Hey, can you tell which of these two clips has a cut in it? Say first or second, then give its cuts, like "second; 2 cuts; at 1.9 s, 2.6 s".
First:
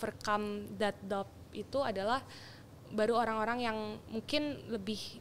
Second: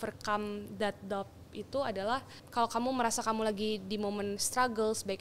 second; 1 cut; at 2.4 s